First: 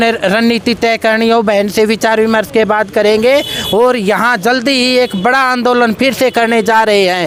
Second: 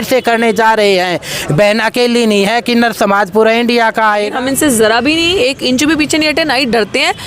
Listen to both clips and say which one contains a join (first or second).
second